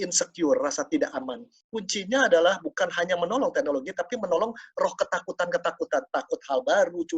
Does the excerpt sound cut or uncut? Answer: cut